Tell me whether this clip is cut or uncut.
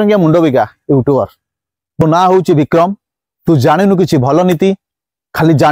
cut